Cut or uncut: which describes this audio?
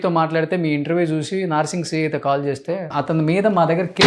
cut